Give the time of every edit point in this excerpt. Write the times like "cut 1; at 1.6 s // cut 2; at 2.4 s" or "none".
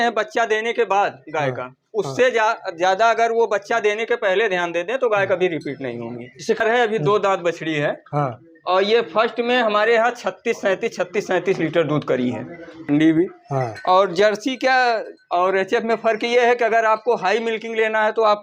cut 1; at 6.6 s // cut 2; at 12.8 s